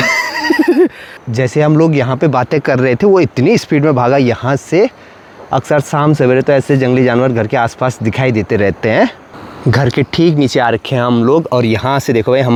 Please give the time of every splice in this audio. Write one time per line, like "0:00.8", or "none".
none

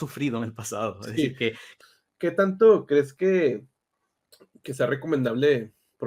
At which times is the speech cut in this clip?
0:01.7

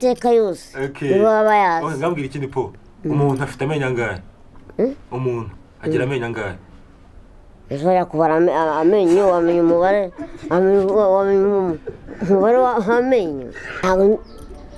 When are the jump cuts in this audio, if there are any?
0:13.8

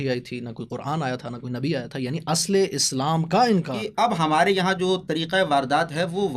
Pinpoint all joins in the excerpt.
0:03.8

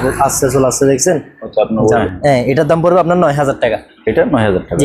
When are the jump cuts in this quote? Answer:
0:02.0

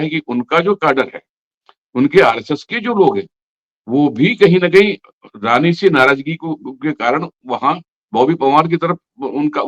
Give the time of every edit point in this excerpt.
none

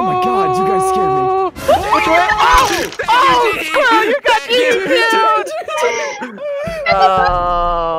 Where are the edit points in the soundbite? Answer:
0:07.1

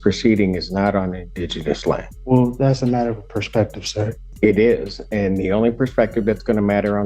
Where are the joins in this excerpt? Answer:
0:02.1
0:04.2

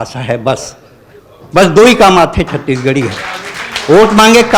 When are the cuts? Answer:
none

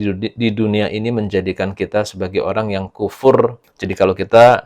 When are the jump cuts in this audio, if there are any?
0:03.7

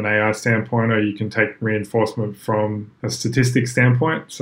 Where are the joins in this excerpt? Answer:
0:02.9

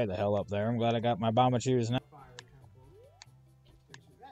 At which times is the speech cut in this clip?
0:02.0

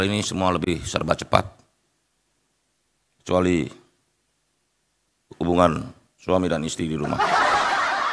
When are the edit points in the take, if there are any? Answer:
0:07.1

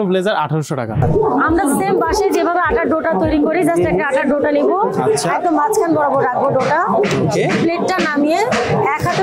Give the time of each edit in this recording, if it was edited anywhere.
0:01.0

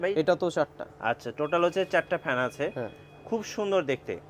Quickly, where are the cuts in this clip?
none

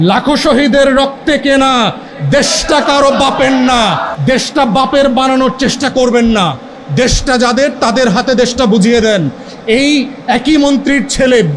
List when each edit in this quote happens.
0:04.1

